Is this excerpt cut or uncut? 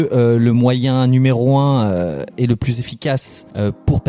uncut